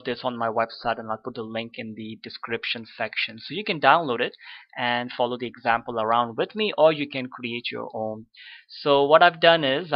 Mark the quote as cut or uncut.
cut